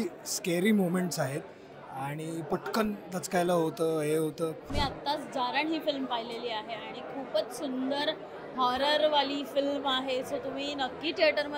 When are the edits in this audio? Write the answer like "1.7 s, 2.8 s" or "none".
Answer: 4.7 s